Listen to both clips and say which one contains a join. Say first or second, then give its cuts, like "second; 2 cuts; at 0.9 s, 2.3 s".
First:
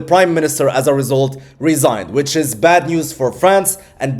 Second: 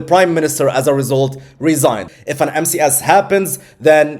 second; 1 cut; at 2.1 s